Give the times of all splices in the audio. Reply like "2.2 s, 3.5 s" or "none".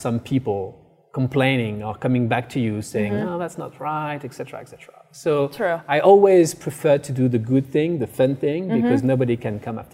none